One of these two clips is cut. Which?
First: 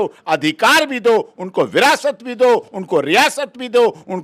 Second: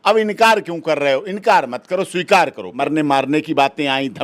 second; 1 cut; at 2.8 s

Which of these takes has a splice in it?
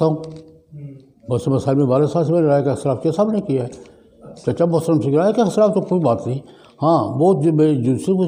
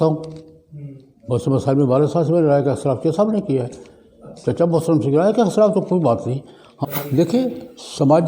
second; 1 cut; at 6.7 s

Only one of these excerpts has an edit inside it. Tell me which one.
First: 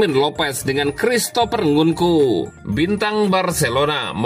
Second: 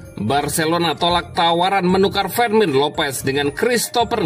first; 1 cut; at 2.6 s

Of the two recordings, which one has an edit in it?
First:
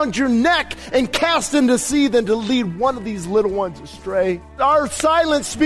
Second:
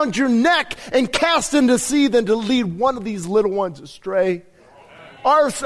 first; 1 cut; at 4.5 s

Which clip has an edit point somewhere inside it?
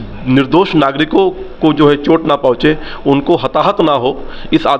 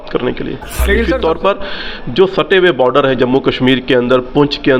second; 1 cut; at 1.0 s

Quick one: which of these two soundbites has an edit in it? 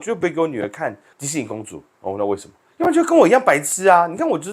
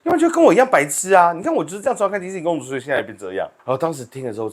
first; 1 cut; at 1.1 s

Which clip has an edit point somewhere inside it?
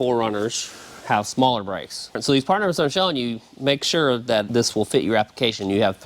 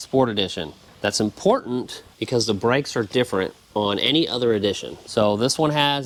first; 1 cut; at 2.2 s

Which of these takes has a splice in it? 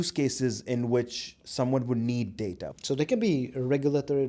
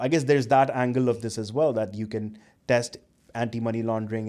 first; 1 cut; at 2.6 s

